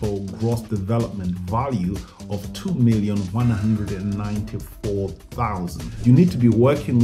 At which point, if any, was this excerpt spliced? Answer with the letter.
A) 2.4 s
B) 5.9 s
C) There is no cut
B